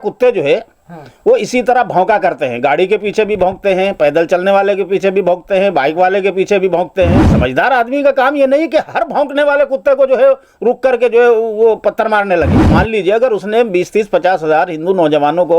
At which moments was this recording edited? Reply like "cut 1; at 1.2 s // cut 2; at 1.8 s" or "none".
cut 1; at 7.3 s // cut 2; at 12.6 s